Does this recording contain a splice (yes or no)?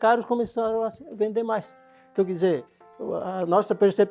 no